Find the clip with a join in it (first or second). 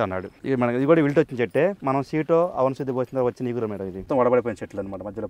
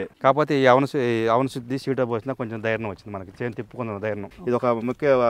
second